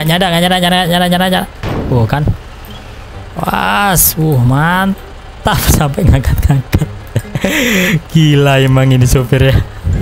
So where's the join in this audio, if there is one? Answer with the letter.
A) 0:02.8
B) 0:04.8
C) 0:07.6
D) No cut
D